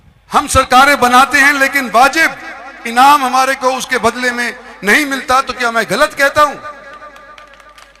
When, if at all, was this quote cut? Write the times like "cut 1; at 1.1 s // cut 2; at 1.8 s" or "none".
none